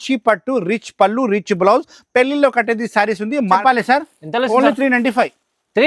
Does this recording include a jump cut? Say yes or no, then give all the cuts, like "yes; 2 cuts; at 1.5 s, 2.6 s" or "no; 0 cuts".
yes; 1 cut; at 3.6 s